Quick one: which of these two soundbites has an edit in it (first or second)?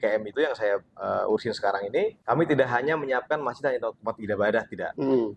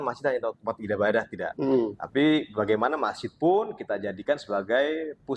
first